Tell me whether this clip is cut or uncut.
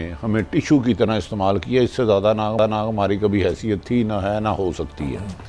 cut